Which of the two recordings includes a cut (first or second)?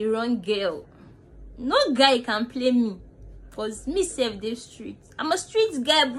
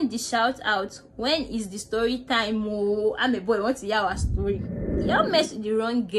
second